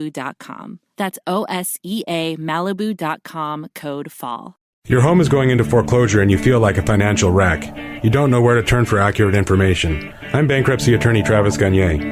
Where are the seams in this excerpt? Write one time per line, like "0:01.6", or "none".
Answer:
0:04.7

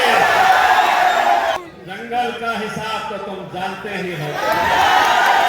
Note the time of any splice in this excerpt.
0:01.8

